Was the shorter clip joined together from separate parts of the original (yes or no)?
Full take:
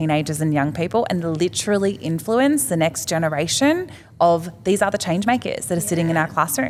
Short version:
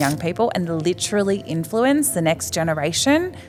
no